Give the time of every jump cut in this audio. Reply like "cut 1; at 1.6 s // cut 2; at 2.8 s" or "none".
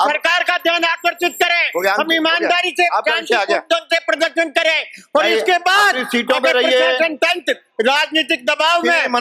none